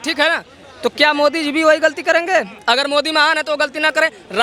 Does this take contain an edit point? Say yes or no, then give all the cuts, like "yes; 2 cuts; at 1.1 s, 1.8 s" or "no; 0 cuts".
no; 0 cuts